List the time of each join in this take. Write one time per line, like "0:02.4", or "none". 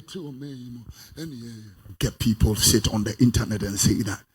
0:01.9